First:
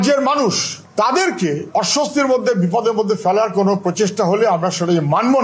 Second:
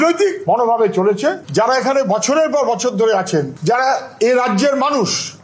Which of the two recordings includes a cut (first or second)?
second